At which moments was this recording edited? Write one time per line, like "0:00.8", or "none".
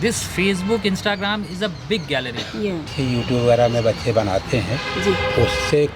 0:02.9